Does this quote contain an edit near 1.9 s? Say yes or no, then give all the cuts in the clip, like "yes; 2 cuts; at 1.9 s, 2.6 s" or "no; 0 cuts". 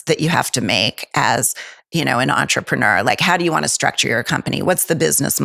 no; 0 cuts